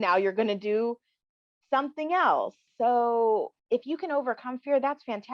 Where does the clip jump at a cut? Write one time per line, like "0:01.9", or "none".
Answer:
0:02.6
0:03.6